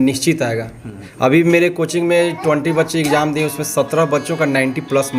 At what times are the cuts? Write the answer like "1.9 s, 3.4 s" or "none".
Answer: 1.1 s